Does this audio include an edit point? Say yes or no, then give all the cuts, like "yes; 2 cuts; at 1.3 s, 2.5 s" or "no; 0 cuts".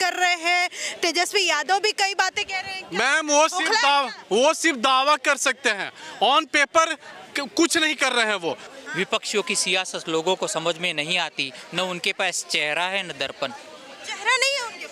yes; 1 cut; at 8.7 s